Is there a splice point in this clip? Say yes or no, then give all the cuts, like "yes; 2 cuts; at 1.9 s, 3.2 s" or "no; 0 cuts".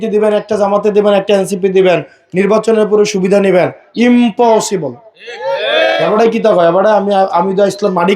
yes; 1 cut; at 6.0 s